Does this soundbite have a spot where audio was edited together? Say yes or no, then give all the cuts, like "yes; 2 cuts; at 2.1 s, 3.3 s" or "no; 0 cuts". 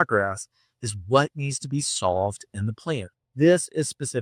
no; 0 cuts